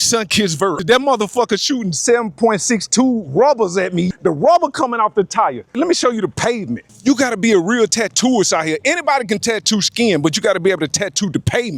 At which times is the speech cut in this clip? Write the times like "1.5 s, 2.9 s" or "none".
0.8 s, 4.1 s, 5.7 s, 6.9 s

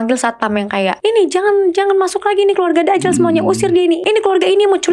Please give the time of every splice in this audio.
1.0 s, 4.0 s

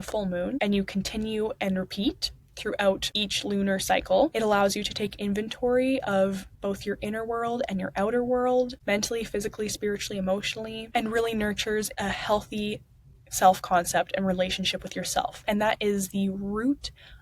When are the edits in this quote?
15.4 s

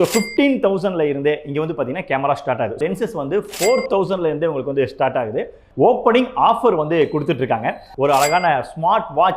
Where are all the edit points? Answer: 2.8 s, 5.6 s, 7.8 s

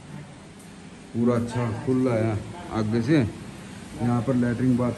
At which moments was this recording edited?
none

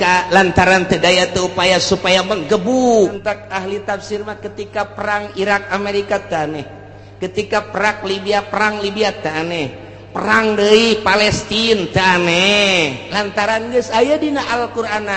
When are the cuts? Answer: 3.1 s

